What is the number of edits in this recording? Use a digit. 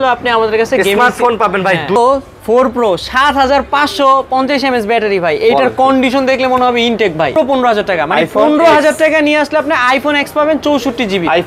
2